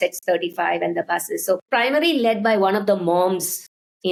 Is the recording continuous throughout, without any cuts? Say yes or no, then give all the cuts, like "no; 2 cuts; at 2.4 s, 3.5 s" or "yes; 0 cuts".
yes; 0 cuts